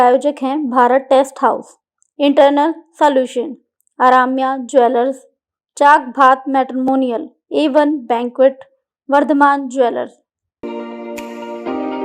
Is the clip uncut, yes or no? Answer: no